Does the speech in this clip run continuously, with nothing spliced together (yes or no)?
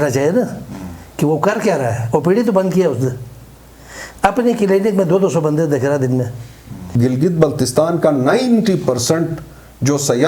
no